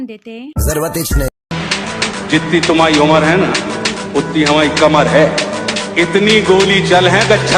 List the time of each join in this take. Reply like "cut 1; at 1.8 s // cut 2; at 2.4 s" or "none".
cut 1; at 1.5 s